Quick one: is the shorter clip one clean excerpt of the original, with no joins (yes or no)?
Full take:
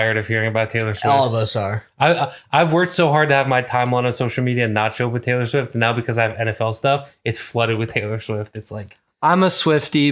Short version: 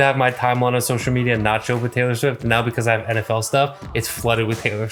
yes